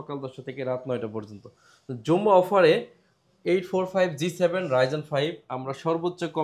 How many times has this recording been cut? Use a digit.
0